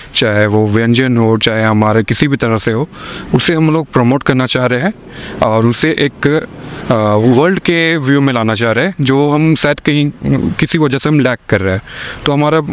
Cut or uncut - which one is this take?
uncut